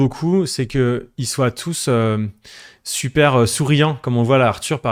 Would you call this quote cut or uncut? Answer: uncut